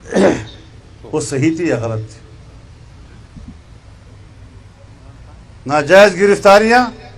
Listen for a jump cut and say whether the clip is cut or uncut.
cut